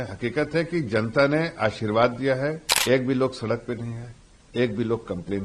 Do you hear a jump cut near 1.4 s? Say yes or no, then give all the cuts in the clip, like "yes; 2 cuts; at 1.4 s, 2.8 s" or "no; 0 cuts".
no; 1 cut; at 2.7 s